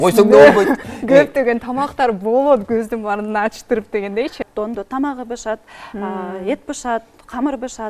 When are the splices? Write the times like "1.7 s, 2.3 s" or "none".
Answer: 4.5 s